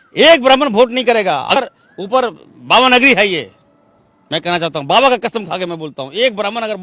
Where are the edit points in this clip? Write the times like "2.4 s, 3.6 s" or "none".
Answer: 1.6 s